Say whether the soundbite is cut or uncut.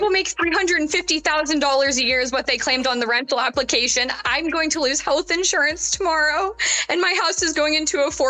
uncut